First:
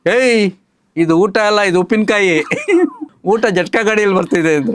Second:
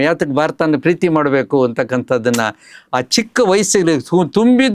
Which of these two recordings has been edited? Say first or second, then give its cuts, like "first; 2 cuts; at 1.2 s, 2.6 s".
first; 1 cut; at 3.1 s